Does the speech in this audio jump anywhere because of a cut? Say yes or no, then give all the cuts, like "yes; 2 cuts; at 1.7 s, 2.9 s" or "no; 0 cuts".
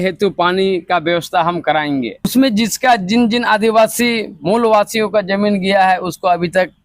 yes; 1 cut; at 2.3 s